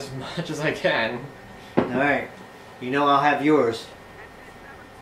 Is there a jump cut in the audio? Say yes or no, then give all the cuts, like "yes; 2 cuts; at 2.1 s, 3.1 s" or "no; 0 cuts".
yes; 1 cut; at 3.0 s